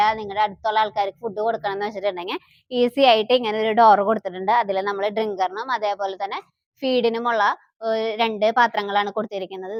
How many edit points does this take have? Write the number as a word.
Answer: zero